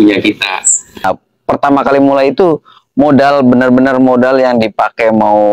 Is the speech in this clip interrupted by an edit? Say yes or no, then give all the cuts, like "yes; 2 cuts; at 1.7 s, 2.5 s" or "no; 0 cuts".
yes; 1 cut; at 1.0 s